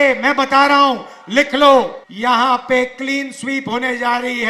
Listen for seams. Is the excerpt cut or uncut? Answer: cut